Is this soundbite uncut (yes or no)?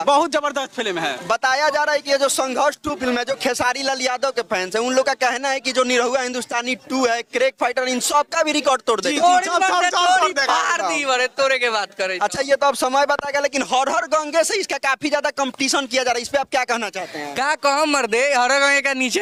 yes